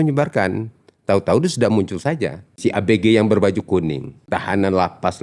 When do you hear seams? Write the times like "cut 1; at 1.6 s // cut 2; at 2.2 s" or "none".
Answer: cut 1; at 2.5 s // cut 2; at 4.2 s